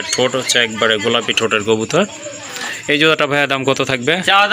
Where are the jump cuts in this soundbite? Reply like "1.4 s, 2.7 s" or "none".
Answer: none